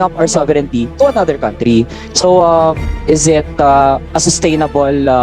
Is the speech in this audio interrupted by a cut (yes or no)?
no